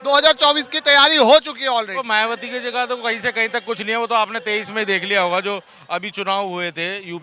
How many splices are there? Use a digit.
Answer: 1